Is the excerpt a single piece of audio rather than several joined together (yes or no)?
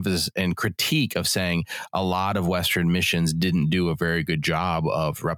yes